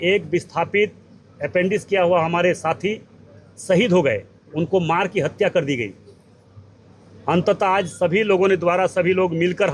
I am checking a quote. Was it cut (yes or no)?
no